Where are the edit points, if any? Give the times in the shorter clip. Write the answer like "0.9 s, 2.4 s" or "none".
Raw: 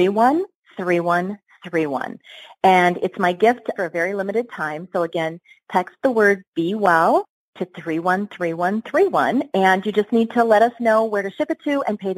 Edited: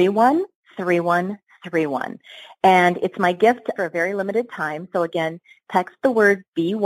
none